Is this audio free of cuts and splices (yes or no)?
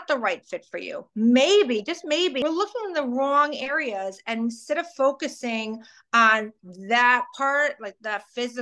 no